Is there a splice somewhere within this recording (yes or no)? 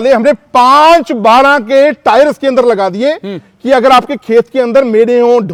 no